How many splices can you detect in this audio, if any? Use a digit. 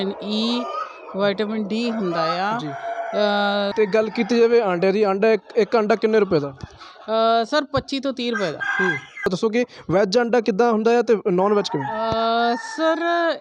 2